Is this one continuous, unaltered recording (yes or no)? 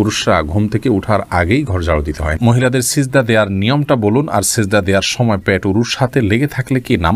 no